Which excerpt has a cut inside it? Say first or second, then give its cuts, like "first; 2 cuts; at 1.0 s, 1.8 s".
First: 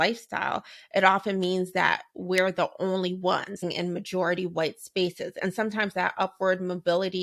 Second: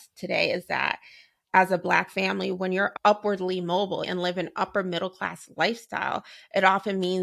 second; 1 cut; at 2.9 s